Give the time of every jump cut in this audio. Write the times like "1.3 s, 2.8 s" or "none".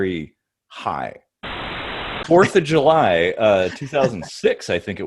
1.7 s